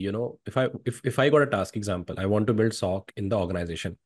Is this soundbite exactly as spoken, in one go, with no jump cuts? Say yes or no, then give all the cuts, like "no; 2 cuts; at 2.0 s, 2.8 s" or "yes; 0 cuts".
yes; 0 cuts